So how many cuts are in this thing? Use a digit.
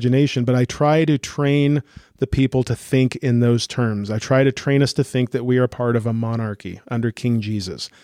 0